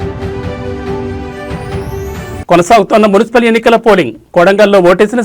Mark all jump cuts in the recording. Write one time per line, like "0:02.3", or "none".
none